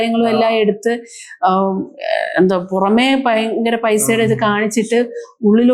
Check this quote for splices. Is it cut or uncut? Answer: uncut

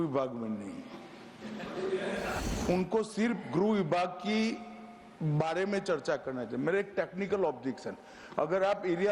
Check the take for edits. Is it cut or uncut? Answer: cut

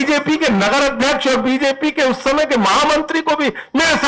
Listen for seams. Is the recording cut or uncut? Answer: uncut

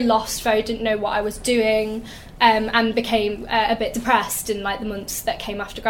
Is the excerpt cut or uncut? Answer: uncut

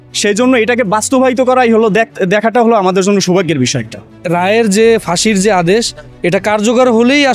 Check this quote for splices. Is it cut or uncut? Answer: cut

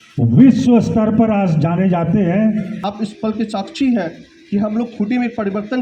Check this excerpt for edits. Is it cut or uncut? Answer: cut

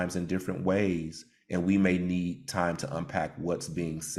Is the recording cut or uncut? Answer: uncut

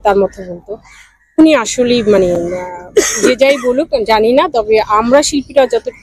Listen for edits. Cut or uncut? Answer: uncut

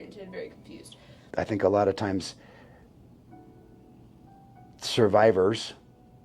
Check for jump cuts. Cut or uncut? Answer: cut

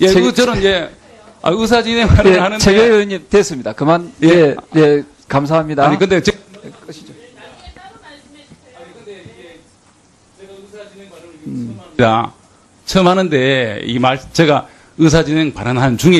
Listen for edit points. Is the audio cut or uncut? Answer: uncut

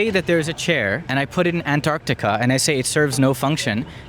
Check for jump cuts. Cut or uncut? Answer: cut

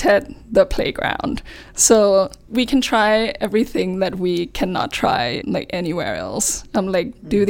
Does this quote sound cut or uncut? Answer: cut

